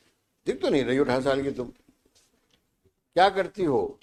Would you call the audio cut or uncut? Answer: uncut